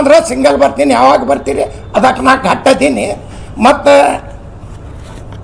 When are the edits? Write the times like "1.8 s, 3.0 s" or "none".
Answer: none